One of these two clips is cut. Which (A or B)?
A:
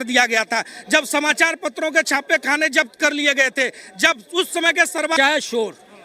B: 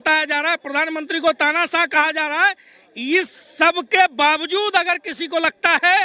A